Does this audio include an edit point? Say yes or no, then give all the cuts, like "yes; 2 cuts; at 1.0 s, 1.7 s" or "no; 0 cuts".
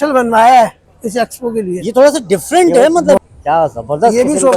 yes; 1 cut; at 3.2 s